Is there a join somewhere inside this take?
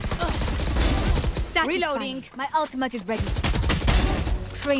no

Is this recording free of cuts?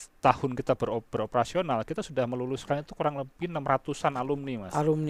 yes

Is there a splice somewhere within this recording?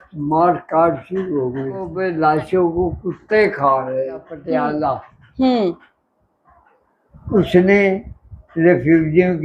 yes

